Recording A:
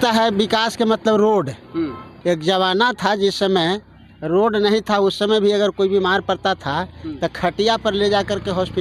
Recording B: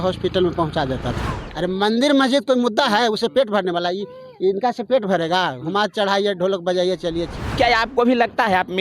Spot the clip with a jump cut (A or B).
B